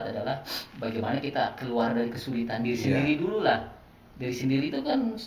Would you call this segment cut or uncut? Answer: uncut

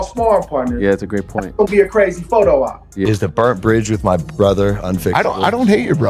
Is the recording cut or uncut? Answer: cut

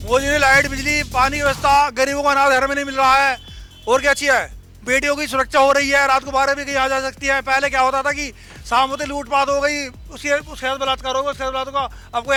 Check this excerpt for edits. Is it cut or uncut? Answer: uncut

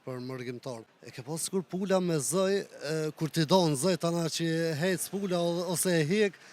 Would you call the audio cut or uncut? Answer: cut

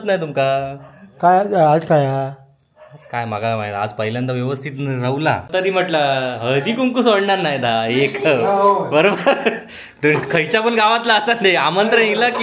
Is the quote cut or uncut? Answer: cut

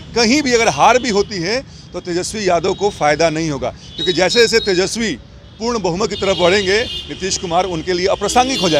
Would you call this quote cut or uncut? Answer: uncut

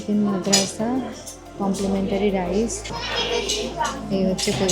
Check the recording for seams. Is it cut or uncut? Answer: cut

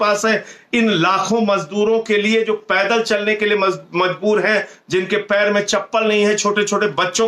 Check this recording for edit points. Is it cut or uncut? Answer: uncut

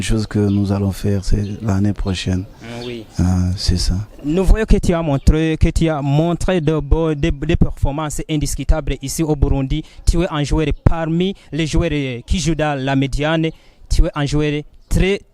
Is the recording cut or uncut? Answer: uncut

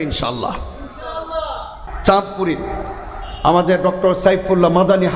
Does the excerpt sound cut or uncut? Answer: cut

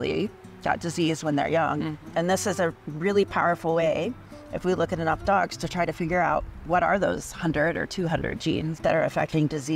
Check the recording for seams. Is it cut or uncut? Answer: cut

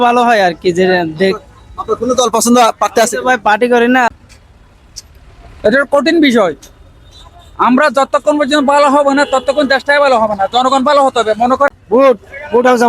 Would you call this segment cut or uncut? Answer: cut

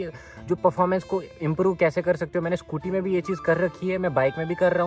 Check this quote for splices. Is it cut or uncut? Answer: uncut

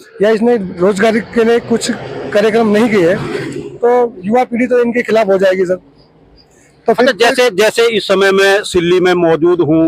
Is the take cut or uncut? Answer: uncut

